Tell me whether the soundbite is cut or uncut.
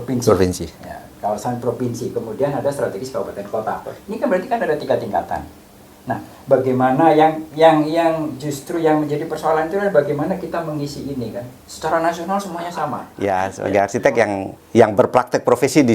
cut